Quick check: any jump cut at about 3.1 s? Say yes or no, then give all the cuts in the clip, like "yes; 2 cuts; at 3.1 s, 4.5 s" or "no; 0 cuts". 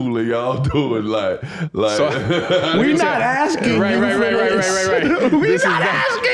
no; 0 cuts